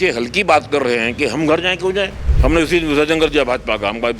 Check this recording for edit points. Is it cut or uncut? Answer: cut